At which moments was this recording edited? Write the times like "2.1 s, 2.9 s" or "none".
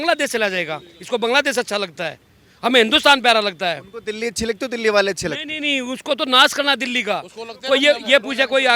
none